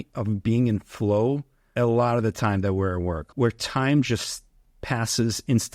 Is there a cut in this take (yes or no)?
yes